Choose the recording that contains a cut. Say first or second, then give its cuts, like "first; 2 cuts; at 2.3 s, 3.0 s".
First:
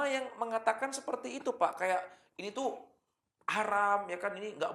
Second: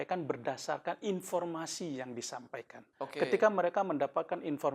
second; 1 cut; at 2.8 s